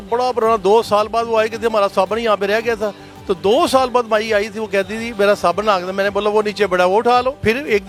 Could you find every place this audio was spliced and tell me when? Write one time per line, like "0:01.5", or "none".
none